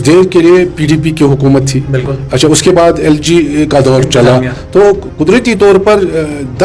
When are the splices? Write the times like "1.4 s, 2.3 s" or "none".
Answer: none